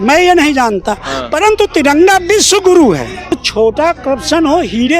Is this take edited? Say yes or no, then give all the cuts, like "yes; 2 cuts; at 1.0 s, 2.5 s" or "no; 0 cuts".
yes; 1 cut; at 3.3 s